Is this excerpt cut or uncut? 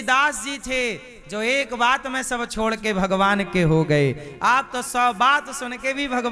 uncut